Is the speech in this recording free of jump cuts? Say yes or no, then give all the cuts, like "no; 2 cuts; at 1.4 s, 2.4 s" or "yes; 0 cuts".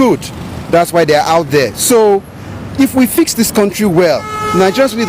yes; 0 cuts